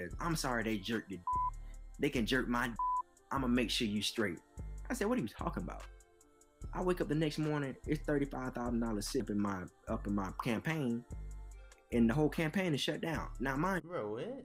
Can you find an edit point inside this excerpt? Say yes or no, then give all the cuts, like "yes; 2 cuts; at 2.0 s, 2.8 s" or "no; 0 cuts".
no; 0 cuts